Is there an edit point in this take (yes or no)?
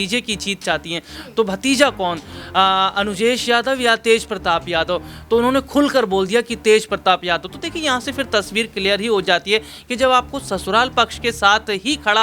no